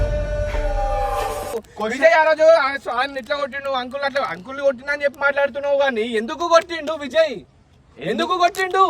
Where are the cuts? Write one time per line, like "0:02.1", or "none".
0:01.6